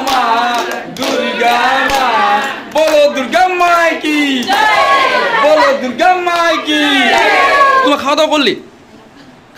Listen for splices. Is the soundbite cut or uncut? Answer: cut